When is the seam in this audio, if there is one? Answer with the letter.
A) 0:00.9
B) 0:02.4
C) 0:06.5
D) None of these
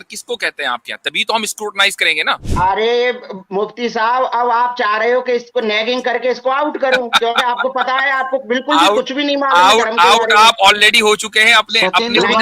B